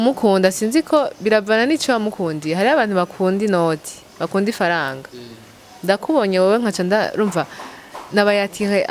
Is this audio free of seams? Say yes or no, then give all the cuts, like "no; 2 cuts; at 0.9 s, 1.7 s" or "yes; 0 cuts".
yes; 0 cuts